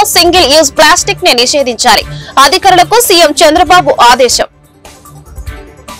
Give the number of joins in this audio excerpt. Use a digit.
0